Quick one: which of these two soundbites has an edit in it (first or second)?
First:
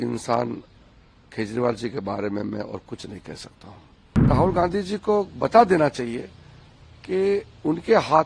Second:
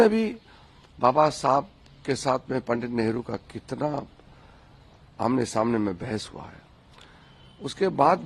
first